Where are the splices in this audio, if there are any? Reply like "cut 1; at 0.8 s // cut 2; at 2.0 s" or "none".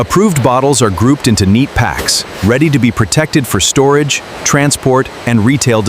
none